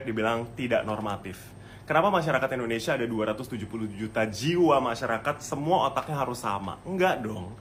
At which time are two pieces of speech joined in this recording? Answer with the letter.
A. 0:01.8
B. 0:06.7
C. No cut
C